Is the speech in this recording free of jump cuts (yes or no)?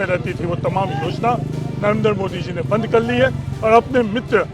yes